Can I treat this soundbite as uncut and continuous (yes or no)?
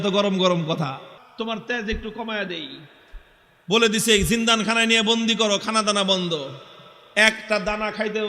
no